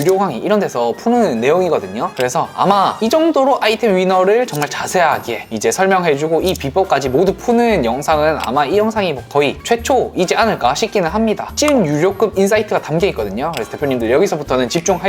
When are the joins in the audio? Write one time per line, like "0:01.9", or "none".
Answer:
0:11.5